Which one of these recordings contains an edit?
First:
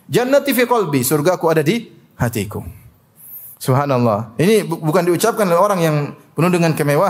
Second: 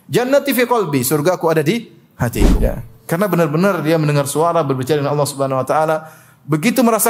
second; 1 cut; at 2.5 s

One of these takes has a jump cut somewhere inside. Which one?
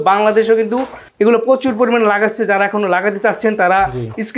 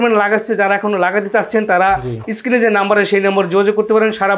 first; 1 cut; at 1.0 s

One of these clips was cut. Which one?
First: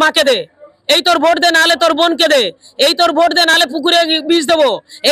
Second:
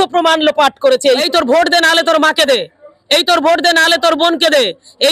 second; 1 cut; at 1.2 s

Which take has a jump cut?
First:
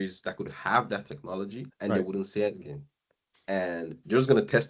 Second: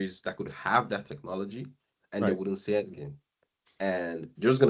first; 1 cut; at 1.6 s

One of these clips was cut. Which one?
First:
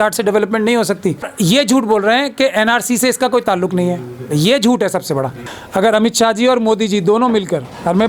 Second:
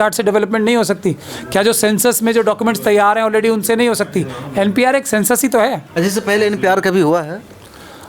first; 2 cuts; at 1.3 s, 5.4 s

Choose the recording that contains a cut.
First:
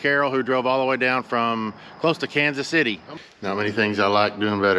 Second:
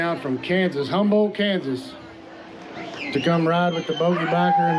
first; 1 cut; at 3.1 s

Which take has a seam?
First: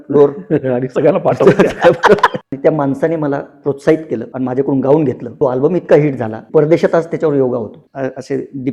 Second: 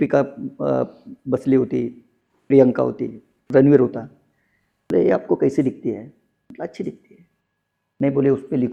first; 5 cuts; at 2.4 s, 4.3 s, 5.3 s, 6.3 s, 7.8 s

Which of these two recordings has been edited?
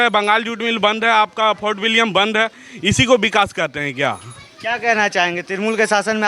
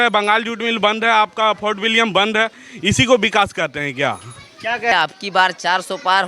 second; 1 cut; at 4.9 s

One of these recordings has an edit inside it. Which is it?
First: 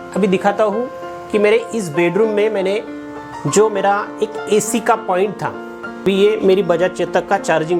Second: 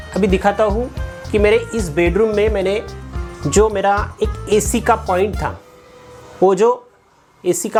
first; 1 cut; at 6.0 s

